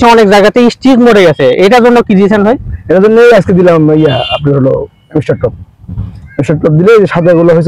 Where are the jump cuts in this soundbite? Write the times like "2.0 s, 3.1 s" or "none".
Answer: none